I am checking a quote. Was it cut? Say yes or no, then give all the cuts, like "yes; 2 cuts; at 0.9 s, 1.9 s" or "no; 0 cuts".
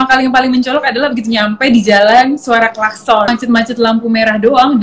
yes; 1 cut; at 3.3 s